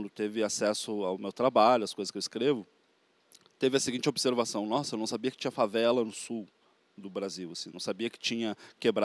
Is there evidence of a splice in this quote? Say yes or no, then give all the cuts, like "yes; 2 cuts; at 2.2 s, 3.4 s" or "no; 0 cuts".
no; 0 cuts